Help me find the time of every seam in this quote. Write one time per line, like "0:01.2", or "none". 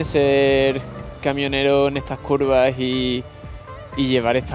none